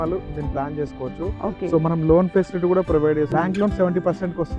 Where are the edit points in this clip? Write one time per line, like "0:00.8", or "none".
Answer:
0:03.3